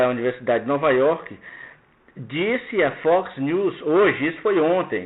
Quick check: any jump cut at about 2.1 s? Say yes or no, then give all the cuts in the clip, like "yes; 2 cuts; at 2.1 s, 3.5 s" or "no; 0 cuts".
yes; 1 cut; at 2.1 s